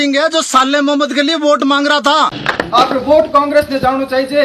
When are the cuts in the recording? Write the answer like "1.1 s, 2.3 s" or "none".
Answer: 2.6 s